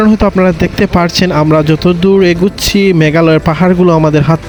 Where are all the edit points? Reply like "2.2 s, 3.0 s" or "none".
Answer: none